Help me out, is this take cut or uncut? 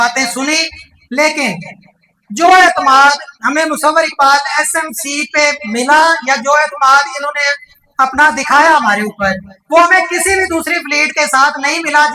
uncut